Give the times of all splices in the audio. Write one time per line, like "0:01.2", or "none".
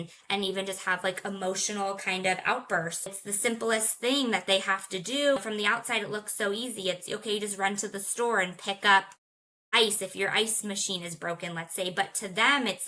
0:03.1
0:05.4